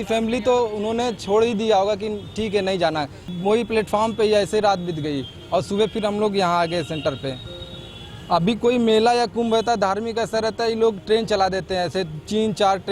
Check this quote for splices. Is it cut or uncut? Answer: cut